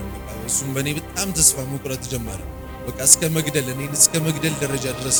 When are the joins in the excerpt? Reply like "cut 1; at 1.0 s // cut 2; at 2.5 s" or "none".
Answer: none